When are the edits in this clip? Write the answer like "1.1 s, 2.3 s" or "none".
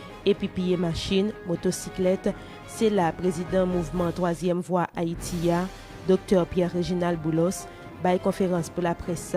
1.9 s